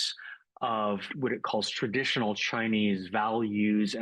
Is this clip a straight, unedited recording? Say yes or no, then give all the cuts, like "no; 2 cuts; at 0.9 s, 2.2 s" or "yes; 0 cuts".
no; 1 cut; at 1.1 s